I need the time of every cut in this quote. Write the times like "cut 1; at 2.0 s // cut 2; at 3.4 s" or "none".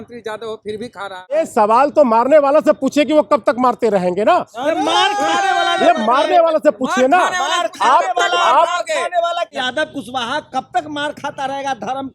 cut 1; at 1.3 s // cut 2; at 9.5 s